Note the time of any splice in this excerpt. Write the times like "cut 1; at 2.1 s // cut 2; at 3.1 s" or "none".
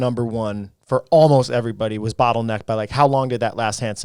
none